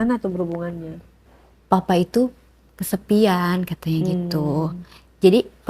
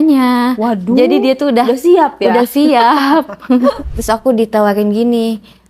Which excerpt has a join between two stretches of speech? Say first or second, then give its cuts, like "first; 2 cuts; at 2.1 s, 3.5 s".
second; 1 cut; at 3.9 s